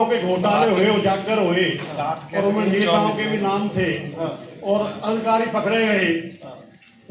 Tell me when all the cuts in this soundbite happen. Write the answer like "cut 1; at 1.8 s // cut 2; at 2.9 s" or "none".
none